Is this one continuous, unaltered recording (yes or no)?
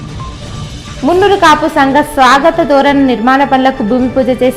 no